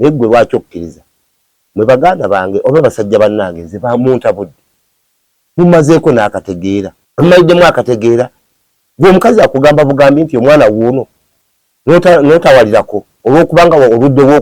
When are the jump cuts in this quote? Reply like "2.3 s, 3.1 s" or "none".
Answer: 7.0 s